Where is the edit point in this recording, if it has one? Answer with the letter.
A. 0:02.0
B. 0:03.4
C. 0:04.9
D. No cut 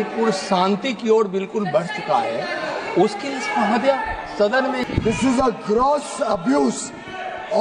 C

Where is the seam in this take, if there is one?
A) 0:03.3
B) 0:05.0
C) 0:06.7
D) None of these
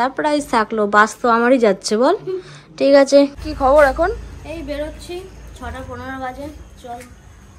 A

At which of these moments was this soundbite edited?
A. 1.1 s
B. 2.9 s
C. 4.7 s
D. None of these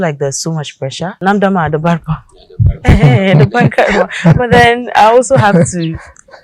A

